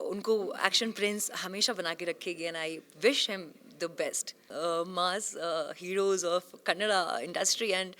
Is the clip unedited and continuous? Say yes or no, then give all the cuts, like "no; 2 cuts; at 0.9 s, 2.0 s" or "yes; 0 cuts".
no; 1 cut; at 4.5 s